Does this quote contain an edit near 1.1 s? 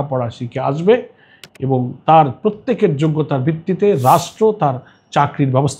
no; 0 cuts

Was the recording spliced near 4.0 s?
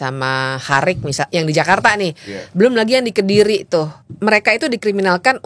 yes; 1 cut; at 4.0 s

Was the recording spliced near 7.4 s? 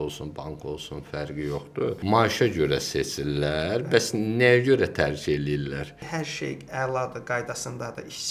no; 2 cuts; at 2.0 s, 6.0 s

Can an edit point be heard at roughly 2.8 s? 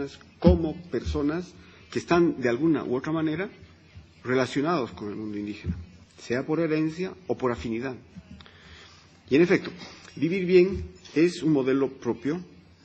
no; 0 cuts

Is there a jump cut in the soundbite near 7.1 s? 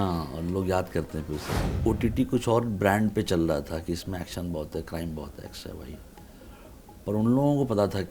no; 1 cut; at 1.7 s

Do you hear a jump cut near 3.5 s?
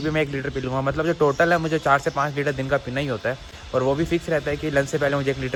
no; 0 cuts

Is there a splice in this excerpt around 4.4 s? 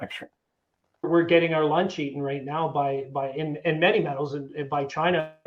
no; 1 cut; at 1.1 s

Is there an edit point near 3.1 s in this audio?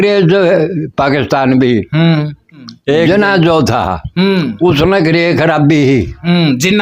yes; 1 cut; at 3.1 s

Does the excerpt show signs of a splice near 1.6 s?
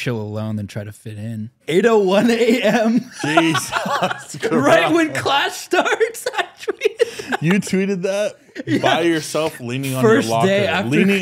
yes; 1 cut; at 1.6 s

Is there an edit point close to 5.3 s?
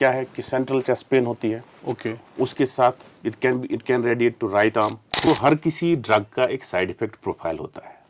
yes; 1 cut; at 5.3 s

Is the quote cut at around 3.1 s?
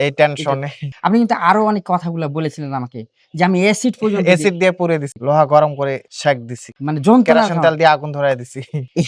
no; 0 cuts

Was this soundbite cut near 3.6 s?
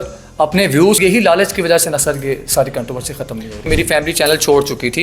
yes; 2 cuts; at 1.0 s, 3.6 s

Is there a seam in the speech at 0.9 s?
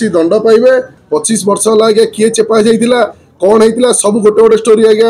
yes; 1 cut; at 0.9 s

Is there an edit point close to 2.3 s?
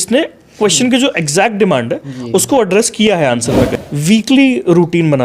no; 1 cut; at 3.8 s

